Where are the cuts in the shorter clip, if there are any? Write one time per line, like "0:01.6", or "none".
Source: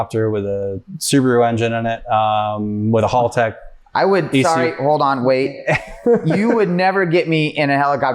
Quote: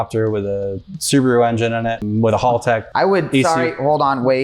0:02.0
0:02.9